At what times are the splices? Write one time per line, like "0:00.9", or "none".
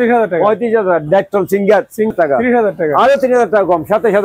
0:02.1

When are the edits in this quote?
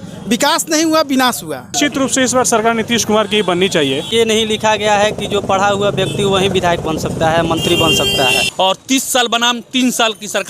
0:01.8
0:04.1
0:08.5

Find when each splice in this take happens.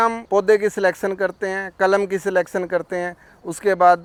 none

